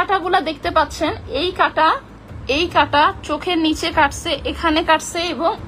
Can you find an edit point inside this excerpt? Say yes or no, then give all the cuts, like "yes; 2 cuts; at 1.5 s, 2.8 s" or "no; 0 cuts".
no; 0 cuts